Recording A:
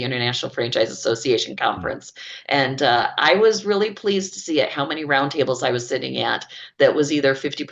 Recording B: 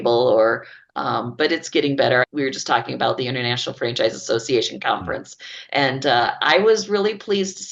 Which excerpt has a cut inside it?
B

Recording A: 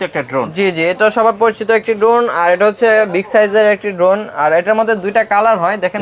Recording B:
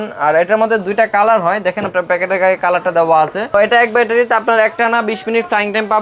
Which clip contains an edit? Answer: B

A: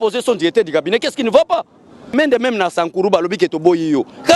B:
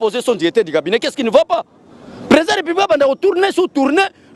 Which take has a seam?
A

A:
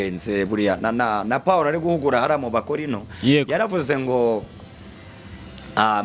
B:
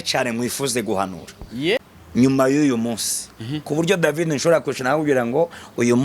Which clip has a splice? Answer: B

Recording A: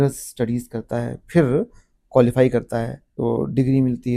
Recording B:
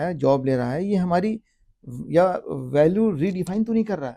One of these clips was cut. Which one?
A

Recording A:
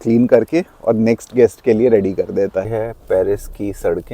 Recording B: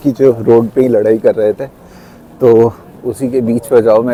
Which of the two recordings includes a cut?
A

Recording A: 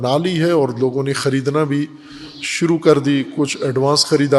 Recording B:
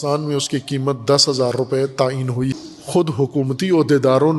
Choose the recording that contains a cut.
B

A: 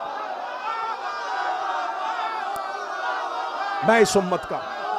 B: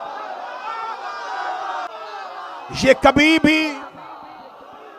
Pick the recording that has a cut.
B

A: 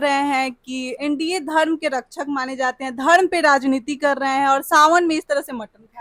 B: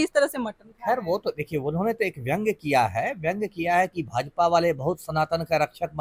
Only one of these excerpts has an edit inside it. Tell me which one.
A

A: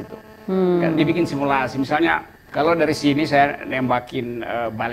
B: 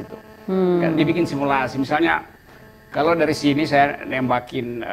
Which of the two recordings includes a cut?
A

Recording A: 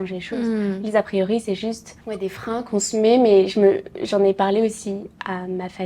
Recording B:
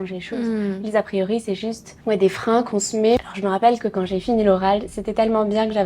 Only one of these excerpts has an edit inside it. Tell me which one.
B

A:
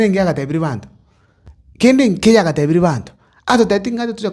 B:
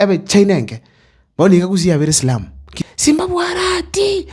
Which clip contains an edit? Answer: B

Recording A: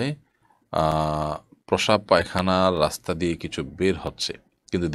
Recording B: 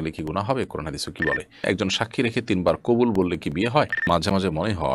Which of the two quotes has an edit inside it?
B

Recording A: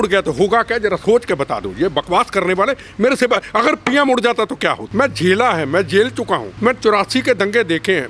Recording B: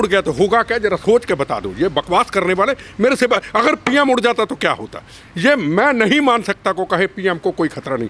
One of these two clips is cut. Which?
A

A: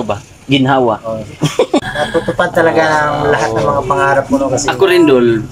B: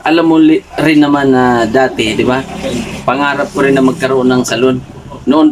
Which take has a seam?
A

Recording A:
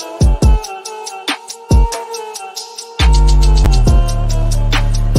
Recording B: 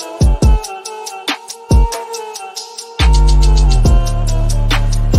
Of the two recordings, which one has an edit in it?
A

